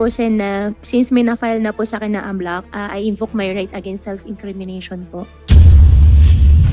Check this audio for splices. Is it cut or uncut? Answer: cut